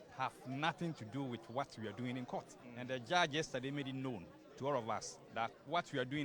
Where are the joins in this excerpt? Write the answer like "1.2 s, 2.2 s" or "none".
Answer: 2.6 s, 5.3 s